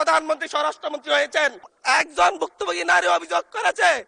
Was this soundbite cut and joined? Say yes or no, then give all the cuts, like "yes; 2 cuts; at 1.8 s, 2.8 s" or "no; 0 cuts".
yes; 1 cut; at 1.7 s